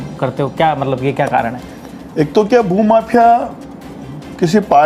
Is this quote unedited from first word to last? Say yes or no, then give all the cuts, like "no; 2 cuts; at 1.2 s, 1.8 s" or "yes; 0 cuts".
yes; 0 cuts